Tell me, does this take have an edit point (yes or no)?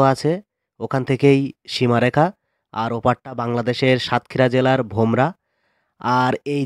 no